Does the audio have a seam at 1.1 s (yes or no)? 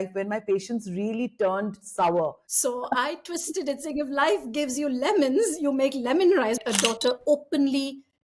no